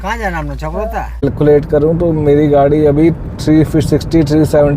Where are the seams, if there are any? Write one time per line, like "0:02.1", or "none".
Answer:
0:01.2